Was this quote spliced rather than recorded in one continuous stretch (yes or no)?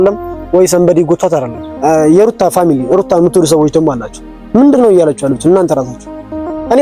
yes